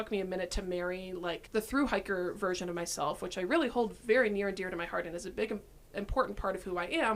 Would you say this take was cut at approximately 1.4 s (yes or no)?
yes